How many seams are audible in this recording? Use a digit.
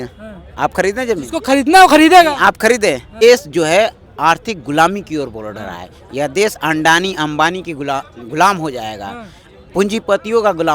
1